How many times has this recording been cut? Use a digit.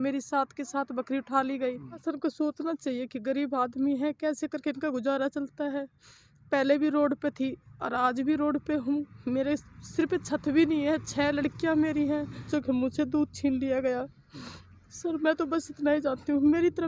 2